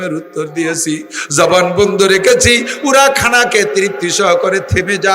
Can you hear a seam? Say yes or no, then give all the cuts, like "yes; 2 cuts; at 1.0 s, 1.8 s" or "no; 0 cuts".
no; 0 cuts